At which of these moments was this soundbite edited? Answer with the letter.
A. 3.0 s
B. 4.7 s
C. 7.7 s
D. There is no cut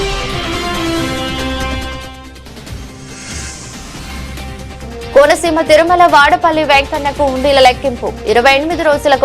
A